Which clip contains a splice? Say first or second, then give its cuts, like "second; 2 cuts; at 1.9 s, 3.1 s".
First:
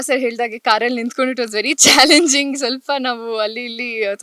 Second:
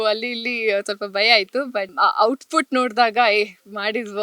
second; 1 cut; at 1.9 s